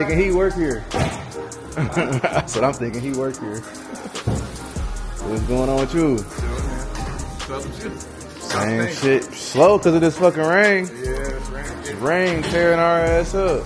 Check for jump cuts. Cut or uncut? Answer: uncut